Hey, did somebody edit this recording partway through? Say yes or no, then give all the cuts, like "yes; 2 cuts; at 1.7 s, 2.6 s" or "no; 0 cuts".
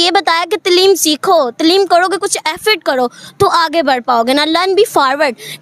no; 0 cuts